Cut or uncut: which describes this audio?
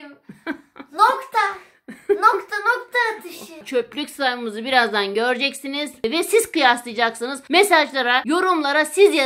cut